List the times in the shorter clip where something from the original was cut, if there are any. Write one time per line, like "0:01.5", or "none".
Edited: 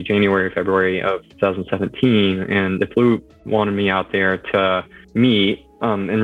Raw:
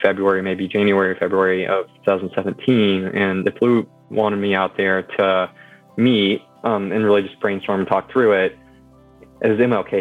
0:04.9